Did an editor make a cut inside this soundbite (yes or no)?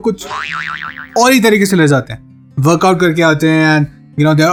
no